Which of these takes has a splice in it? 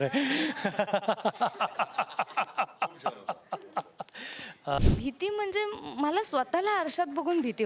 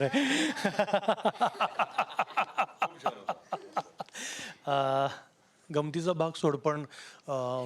first; 1 cut; at 4.8 s

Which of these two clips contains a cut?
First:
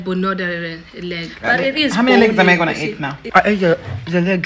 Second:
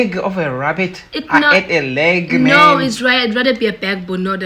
first; 1 cut; at 3.1 s

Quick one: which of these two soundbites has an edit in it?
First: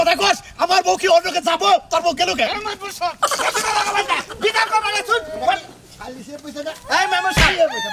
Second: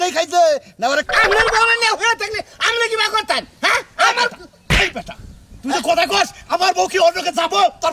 second; 1 cut; at 1.1 s

